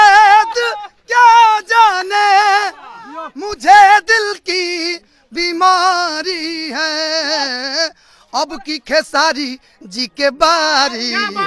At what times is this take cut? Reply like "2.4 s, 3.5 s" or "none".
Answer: none